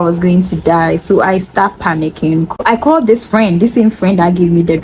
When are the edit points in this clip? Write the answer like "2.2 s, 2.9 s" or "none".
2.6 s

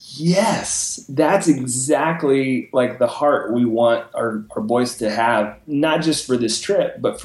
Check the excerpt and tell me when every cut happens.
none

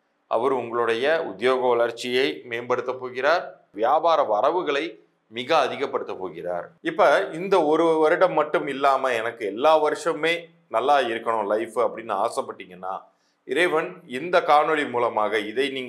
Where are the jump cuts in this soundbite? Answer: 3.7 s, 6.7 s

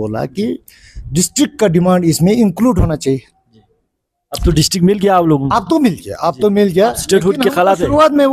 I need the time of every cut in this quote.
none

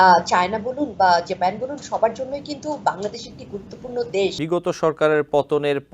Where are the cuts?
4.4 s

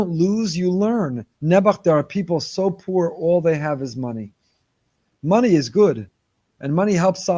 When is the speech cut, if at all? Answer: 1.3 s

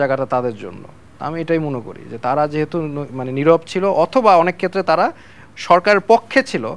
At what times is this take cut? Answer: none

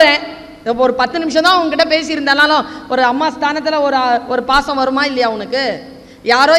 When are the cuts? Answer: none

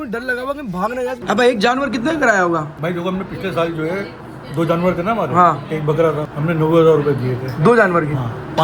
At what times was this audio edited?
1.2 s, 2.8 s

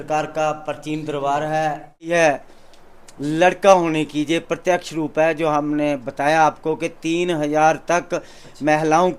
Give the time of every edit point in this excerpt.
2.1 s

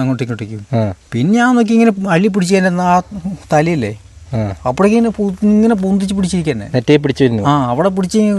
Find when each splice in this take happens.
1.0 s

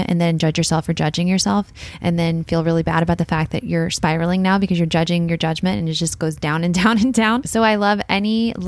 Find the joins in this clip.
7.5 s

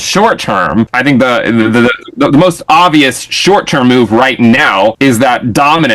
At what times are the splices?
0.9 s, 5.0 s

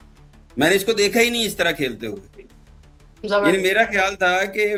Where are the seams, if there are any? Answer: none

